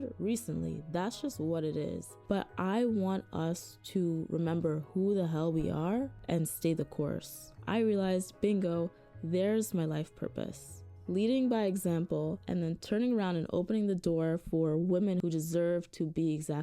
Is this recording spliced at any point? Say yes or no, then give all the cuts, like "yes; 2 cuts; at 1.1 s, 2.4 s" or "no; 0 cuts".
yes; 2 cuts; at 7.6 s, 12.4 s